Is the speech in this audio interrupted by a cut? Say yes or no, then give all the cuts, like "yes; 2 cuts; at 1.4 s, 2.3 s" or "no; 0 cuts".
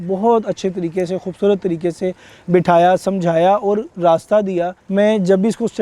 yes; 1 cut; at 4.8 s